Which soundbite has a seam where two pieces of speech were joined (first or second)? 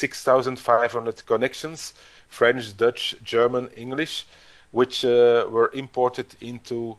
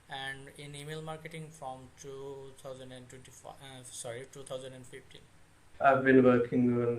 second